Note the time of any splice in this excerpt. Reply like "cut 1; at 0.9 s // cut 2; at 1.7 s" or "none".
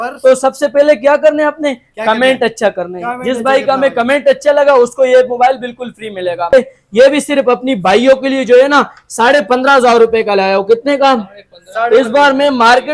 cut 1; at 6.5 s